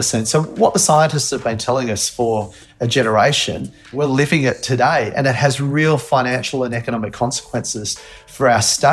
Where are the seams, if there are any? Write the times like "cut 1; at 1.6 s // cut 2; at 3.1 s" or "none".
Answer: cut 1; at 3.9 s

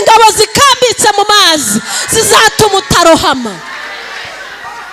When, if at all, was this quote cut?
none

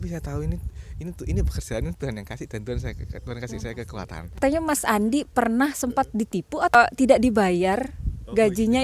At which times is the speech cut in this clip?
cut 1; at 4.4 s // cut 2; at 6.7 s

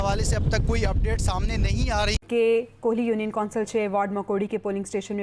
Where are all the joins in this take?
cut 1; at 2.2 s

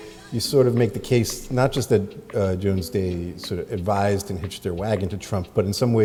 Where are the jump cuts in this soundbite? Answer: none

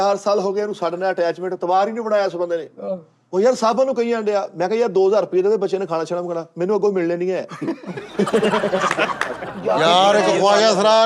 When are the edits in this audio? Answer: cut 1; at 9.5 s

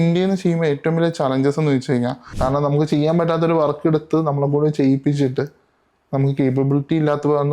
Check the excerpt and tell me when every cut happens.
cut 1; at 2.2 s

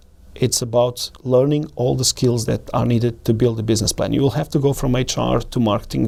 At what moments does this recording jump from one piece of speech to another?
none

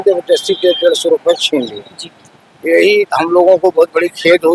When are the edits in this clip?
none

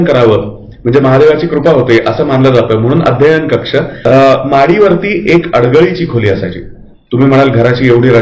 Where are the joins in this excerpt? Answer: cut 1; at 4.0 s

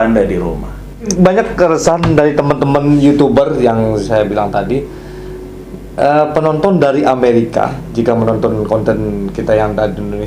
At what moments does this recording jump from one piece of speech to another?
cut 1; at 1.1 s

